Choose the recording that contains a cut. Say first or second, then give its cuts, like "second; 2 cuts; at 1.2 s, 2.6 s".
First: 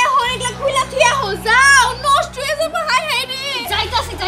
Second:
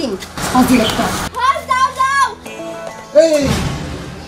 second; 1 cut; at 2.5 s